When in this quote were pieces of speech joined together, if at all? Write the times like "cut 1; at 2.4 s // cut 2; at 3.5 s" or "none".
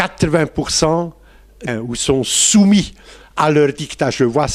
none